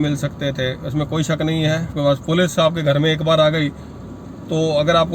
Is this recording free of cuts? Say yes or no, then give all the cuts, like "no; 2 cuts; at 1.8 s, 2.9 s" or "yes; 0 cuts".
no; 1 cut; at 2.0 s